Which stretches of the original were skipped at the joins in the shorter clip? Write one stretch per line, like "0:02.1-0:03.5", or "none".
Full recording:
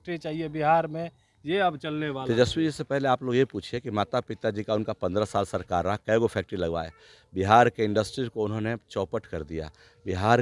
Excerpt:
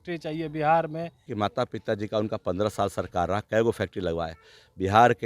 0:01.2-0:03.8